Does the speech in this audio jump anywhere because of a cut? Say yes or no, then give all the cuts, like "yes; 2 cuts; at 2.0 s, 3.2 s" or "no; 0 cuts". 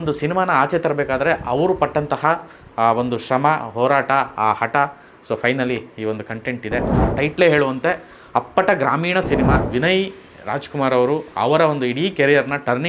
yes; 2 cuts; at 7.1 s, 9.7 s